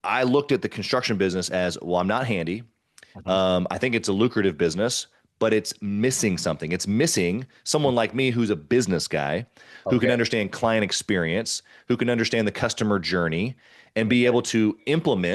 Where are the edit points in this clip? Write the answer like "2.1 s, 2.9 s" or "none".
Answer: none